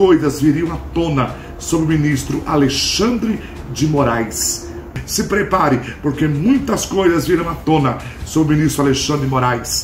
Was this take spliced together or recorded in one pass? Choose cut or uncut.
cut